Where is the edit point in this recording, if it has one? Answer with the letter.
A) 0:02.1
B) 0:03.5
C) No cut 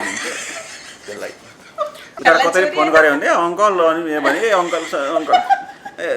A